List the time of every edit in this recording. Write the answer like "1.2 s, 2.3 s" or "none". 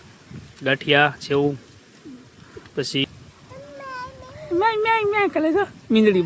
3.0 s